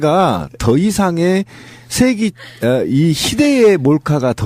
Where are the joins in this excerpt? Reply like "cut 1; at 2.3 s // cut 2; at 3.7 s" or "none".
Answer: cut 1; at 1.8 s